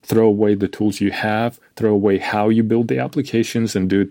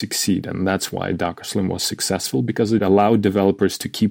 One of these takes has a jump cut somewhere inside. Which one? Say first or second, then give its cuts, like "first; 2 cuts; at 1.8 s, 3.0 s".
second; 1 cut; at 2.8 s